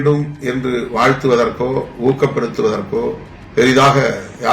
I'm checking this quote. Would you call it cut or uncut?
cut